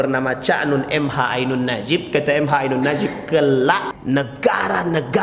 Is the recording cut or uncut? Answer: cut